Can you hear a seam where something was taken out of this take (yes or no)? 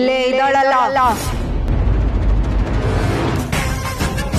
no